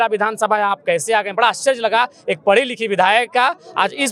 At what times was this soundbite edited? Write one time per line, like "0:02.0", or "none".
none